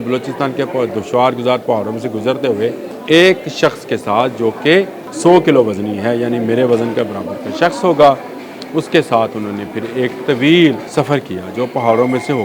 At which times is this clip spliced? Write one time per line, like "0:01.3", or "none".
0:02.9
0:05.0
0:10.8